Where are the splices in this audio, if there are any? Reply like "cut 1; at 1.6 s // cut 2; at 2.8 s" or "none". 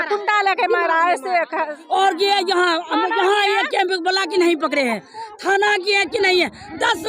cut 1; at 1.7 s